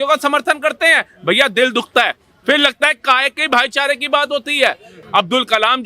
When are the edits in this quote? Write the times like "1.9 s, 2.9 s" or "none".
4.9 s